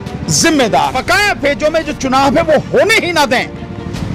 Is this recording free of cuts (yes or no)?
no